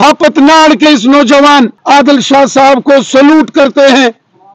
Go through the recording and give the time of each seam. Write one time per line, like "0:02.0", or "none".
0:01.8